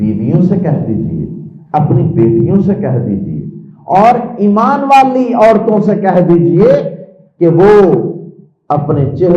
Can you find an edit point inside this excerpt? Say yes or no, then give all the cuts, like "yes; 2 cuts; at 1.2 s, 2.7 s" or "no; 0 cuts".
no; 0 cuts